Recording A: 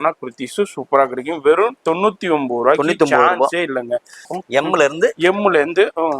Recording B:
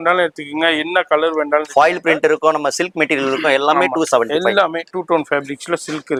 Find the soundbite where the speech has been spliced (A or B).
A